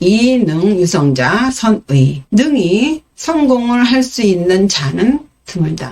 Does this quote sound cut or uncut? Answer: cut